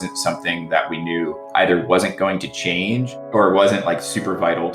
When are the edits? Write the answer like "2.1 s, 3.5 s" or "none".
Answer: 1.4 s, 3.1 s

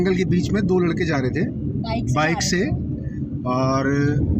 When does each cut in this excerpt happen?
none

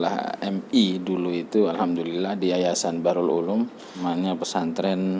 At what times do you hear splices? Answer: 4.0 s

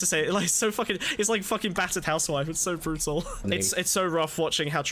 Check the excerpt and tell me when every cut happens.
3.4 s

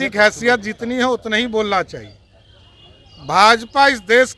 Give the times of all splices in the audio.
none

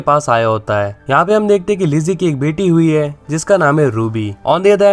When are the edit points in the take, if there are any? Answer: 1.0 s

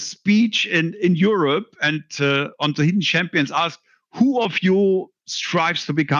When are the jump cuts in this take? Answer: none

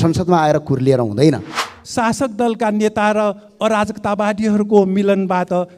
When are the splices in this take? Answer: 1.6 s

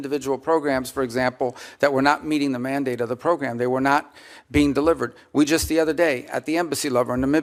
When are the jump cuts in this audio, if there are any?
none

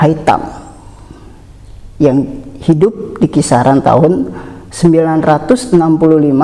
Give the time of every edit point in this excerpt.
none

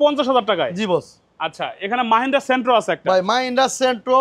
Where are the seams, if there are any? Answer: none

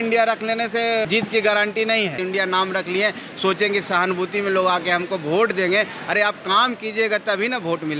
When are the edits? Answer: 1.1 s, 2.2 s

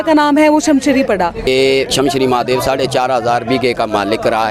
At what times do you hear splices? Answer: 1.5 s

